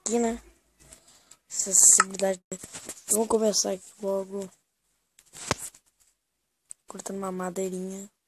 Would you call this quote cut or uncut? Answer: cut